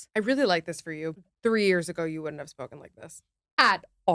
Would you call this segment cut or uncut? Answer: cut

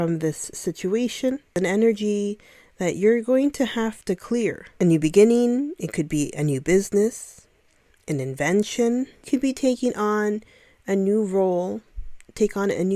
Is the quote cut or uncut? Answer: cut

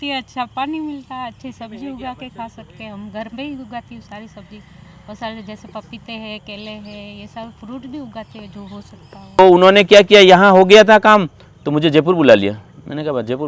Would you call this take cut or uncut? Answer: cut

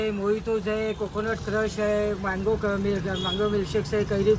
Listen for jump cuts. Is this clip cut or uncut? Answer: uncut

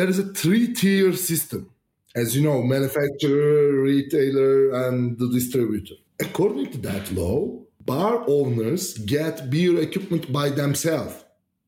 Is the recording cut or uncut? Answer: cut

